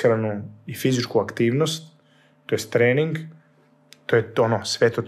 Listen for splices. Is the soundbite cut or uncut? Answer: uncut